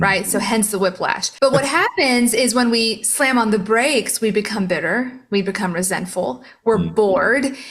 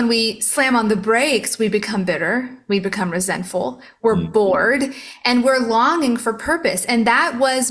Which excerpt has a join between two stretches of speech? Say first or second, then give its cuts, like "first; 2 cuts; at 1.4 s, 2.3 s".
first; 1 cut; at 1.2 s